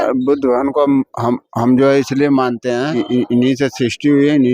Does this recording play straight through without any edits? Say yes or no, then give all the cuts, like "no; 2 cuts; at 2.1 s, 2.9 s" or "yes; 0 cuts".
no; 1 cut; at 3.0 s